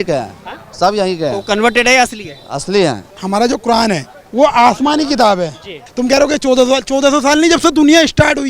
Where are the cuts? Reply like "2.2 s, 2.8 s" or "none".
3.1 s, 4.2 s, 5.8 s